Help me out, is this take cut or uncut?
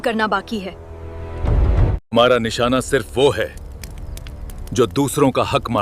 cut